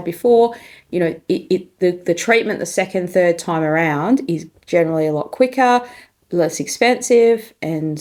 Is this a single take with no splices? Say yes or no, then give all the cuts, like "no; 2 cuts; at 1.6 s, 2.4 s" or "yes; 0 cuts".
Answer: yes; 0 cuts